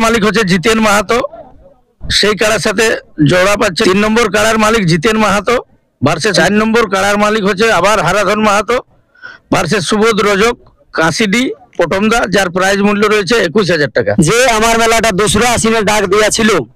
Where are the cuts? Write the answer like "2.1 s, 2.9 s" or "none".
3.8 s, 6.3 s, 14.1 s